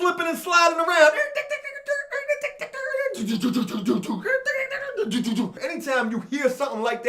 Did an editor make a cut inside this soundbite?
yes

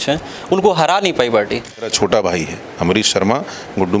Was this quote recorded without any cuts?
no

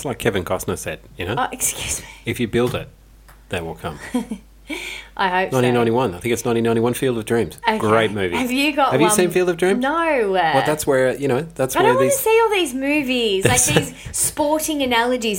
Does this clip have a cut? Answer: no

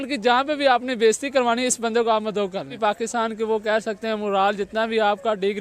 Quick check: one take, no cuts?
no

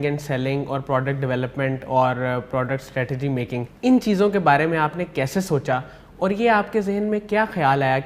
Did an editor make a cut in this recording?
yes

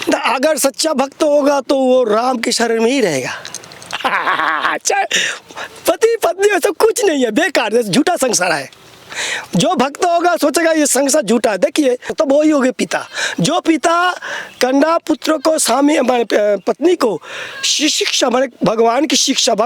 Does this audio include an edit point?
yes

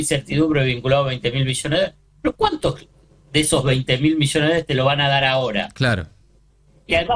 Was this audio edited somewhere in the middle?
no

